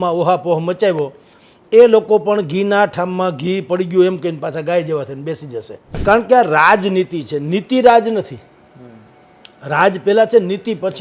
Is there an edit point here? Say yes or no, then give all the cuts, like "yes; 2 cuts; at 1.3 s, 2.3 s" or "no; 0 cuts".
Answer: yes; 1 cut; at 6.0 s